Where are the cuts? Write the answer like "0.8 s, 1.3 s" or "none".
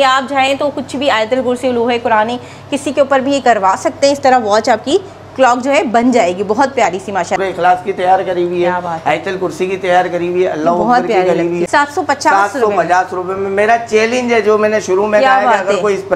7.4 s, 11.6 s